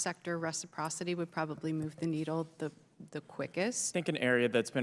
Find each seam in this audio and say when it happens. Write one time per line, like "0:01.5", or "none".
0:03.9

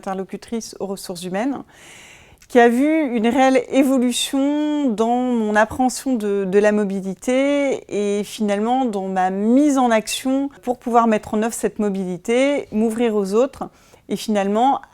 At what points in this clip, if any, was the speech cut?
0:10.7

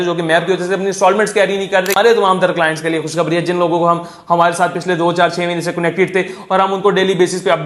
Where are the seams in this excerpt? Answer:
0:02.0

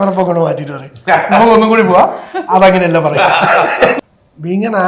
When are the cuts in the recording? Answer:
0:04.0

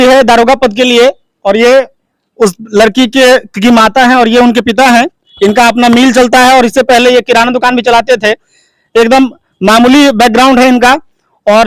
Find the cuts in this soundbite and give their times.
none

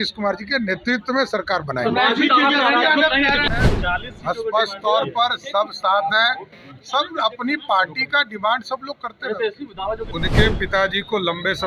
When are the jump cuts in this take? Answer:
0:03.5
0:10.1

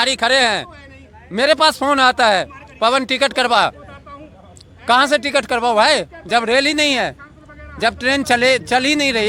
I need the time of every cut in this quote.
none

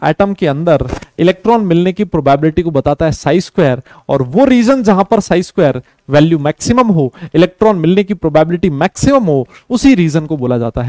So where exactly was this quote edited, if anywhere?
none

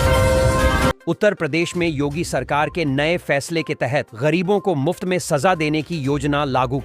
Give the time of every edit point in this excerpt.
0:00.9

